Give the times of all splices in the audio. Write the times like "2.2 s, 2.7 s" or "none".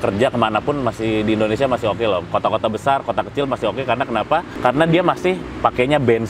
4.5 s, 5.5 s